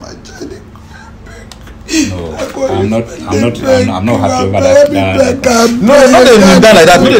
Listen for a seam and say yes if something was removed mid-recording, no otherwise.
no